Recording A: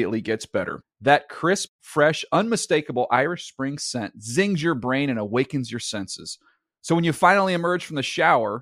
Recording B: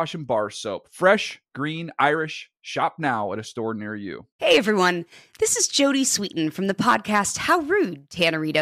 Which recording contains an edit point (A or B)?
B